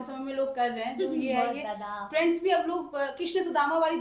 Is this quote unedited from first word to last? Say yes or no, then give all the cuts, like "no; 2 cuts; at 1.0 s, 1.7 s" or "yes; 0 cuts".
yes; 0 cuts